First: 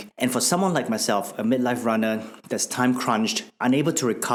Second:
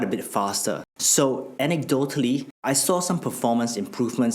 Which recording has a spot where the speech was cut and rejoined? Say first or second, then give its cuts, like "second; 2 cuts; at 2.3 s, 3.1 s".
second; 2 cuts; at 0.9 s, 2.5 s